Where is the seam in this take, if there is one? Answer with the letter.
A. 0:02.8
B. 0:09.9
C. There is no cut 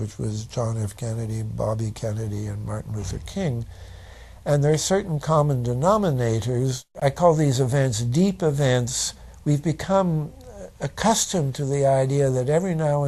A